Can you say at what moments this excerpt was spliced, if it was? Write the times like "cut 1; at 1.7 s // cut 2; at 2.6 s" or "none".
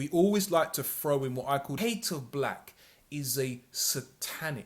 cut 1; at 1.8 s